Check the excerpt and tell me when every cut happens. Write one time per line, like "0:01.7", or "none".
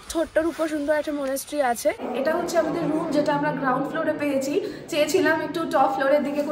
0:02.1